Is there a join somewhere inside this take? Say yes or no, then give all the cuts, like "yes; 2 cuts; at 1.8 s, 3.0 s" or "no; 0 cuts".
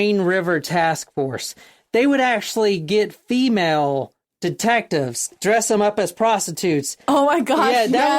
yes; 2 cuts; at 4.2 s, 5.3 s